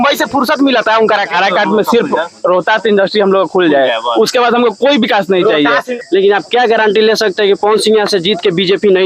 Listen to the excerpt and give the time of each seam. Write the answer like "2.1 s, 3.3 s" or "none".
1.3 s, 5.8 s